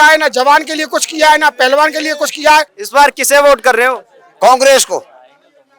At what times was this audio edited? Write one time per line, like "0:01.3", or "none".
0:02.8